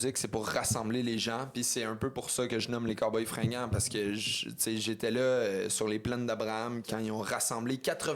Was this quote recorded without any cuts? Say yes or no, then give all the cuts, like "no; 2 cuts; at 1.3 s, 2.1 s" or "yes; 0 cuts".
no; 1 cut; at 6.9 s